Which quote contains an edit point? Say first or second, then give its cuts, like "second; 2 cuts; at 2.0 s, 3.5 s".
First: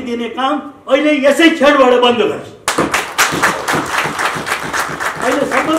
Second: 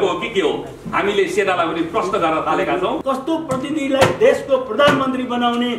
second; 1 cut; at 3.0 s